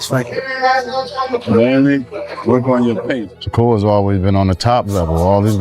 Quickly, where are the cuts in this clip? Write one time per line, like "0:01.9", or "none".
0:03.3

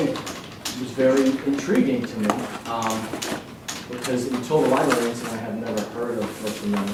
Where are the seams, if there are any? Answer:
none

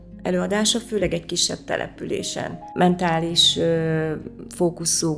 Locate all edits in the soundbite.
0:02.6

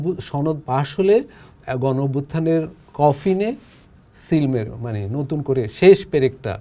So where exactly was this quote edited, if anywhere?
none

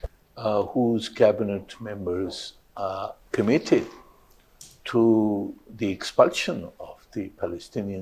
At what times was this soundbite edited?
0:03.2

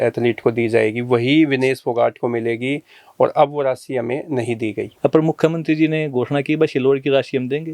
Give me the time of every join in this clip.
0:04.9

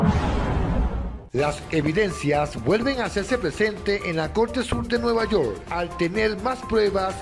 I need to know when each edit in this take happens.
0:01.1

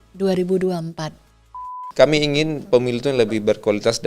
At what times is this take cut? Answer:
0:01.8

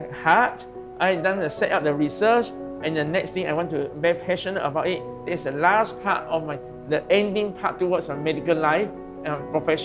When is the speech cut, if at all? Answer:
none

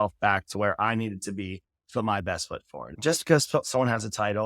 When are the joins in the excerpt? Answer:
0:02.9

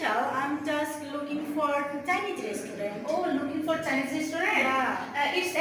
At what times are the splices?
0:02.9

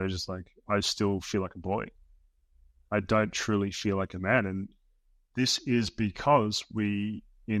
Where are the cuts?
none

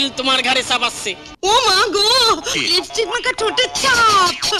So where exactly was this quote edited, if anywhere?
0:01.3

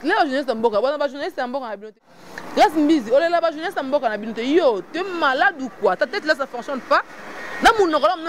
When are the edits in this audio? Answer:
0:01.9

